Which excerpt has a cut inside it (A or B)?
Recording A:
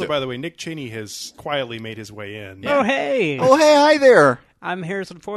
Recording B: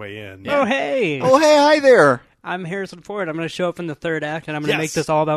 A